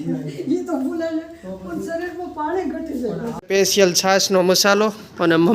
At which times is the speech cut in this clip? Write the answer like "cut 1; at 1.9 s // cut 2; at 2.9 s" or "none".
cut 1; at 3.4 s